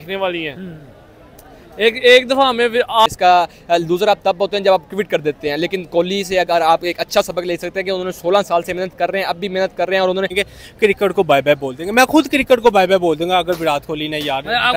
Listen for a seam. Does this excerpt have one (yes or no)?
yes